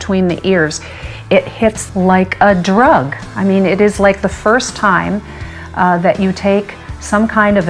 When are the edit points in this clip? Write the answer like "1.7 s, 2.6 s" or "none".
1.8 s